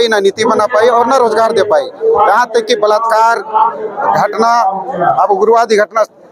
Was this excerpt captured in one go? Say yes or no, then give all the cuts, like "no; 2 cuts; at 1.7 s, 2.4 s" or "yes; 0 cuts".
yes; 0 cuts